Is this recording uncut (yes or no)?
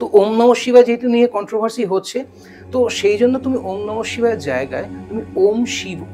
yes